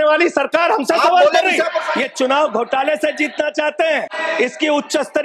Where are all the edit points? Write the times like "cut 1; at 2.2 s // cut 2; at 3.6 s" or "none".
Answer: cut 1; at 1.8 s // cut 2; at 4.2 s